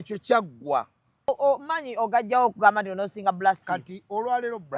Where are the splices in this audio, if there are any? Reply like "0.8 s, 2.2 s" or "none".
1.3 s